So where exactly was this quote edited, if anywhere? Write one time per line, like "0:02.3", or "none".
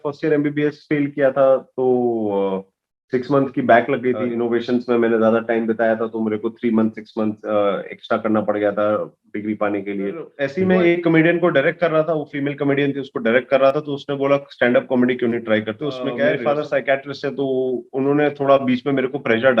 0:04.3
0:10.4
0:16.4

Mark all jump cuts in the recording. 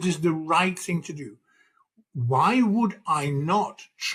none

